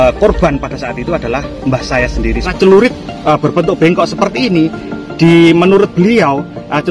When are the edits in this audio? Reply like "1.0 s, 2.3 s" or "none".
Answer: 2.5 s